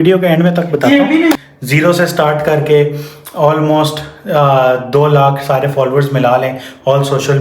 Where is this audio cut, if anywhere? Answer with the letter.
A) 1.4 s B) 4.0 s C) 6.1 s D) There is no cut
A